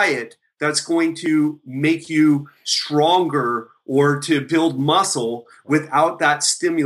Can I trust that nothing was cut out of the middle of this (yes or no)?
yes